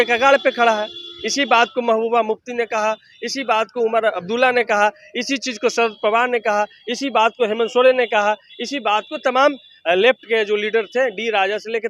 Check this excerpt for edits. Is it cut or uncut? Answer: uncut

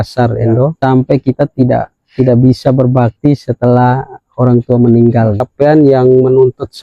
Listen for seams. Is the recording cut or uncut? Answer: cut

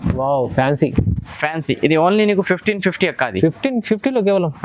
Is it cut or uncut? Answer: uncut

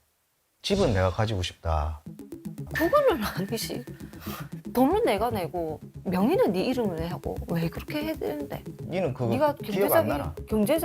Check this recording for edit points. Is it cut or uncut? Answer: cut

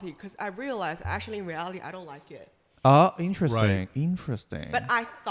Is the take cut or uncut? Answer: uncut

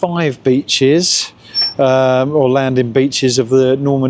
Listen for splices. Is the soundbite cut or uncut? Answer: uncut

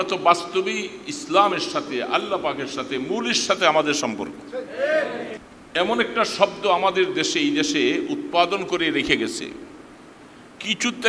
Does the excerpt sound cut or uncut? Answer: cut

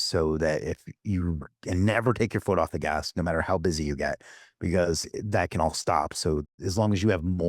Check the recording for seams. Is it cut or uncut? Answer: cut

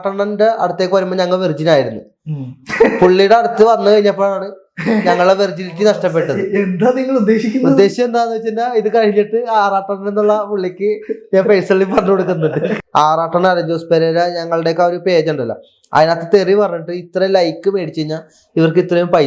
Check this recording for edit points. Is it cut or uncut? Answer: cut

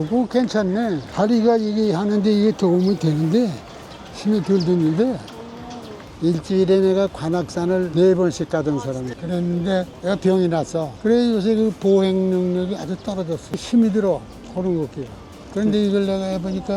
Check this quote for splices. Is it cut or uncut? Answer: cut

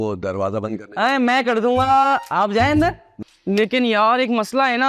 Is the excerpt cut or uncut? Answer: cut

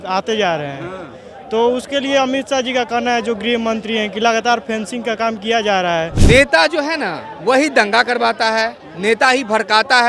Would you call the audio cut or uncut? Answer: cut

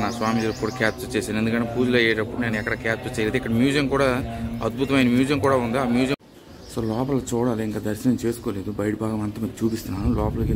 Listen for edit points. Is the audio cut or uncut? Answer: cut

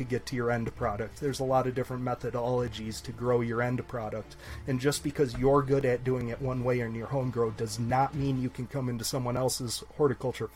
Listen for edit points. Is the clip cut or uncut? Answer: uncut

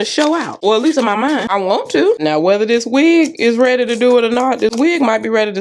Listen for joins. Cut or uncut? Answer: uncut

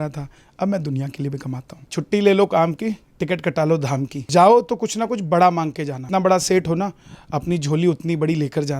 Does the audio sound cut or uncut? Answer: cut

